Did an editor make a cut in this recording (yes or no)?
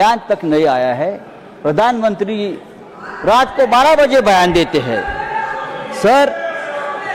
no